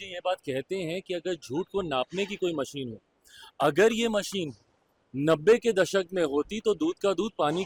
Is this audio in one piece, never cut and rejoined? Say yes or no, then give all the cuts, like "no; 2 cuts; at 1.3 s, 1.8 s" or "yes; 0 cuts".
yes; 0 cuts